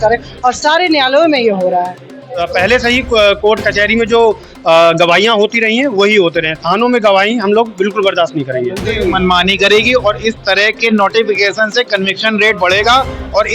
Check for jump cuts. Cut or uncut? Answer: cut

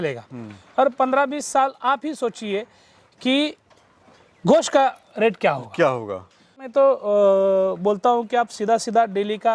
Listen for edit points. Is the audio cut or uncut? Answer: cut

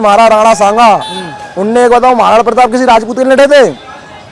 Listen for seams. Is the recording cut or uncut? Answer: uncut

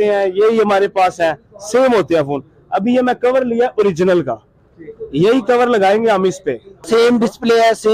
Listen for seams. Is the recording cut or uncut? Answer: cut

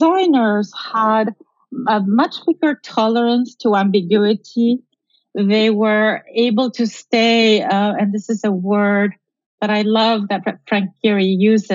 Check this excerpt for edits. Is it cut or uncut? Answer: uncut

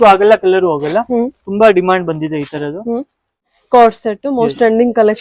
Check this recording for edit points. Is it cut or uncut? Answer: cut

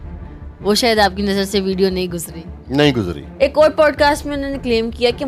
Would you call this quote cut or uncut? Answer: cut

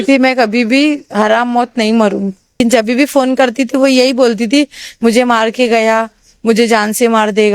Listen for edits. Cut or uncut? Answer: cut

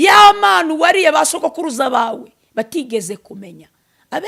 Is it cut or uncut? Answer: uncut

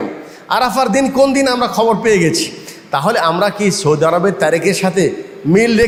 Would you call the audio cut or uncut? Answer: uncut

